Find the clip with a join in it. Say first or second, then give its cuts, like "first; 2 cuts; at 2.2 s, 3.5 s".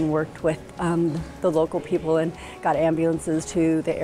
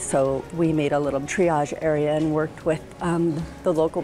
second; 1 cut; at 1.3 s